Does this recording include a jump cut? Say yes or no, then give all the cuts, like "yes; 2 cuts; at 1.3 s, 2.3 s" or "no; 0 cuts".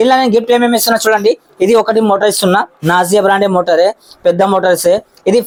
no; 0 cuts